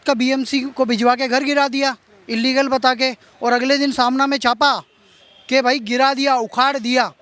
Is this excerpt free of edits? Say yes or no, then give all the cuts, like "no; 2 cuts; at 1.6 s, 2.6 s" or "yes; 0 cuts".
yes; 0 cuts